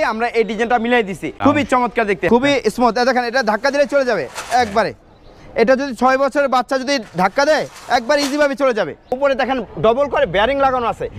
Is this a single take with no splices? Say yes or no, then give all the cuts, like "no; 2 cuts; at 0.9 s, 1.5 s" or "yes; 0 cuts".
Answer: no; 3 cuts; at 1.3 s, 2.3 s, 9.2 s